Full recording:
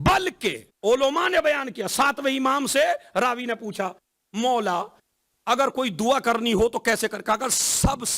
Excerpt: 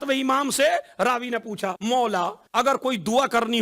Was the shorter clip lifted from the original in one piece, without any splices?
no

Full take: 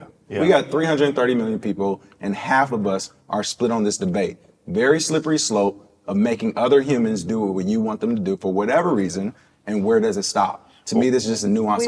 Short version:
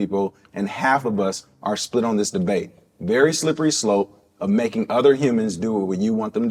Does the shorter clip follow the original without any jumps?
yes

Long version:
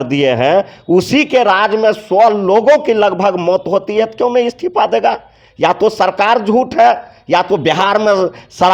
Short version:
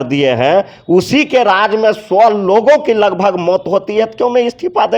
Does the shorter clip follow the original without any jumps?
yes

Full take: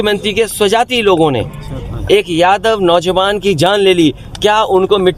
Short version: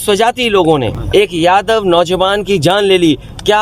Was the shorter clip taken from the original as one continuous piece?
no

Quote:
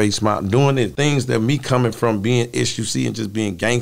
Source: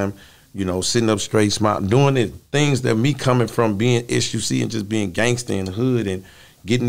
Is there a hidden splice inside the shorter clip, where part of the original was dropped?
yes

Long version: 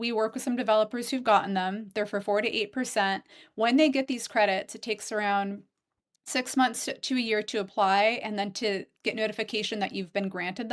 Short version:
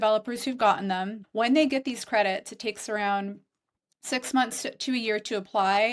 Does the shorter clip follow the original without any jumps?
no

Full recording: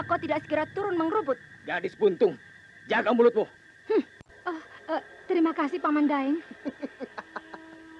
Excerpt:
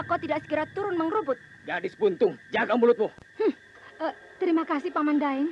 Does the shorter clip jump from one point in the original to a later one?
yes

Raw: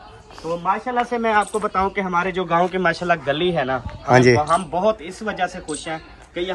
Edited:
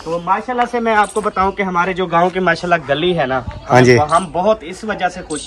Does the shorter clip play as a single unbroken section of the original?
yes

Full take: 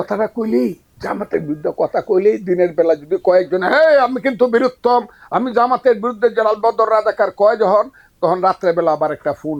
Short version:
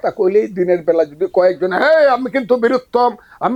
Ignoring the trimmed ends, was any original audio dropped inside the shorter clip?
no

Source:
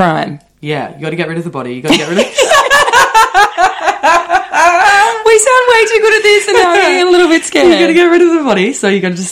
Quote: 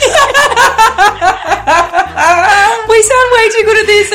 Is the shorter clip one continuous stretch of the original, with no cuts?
yes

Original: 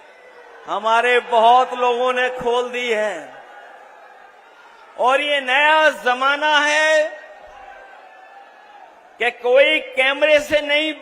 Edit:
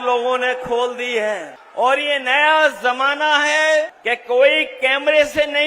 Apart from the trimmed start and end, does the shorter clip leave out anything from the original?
yes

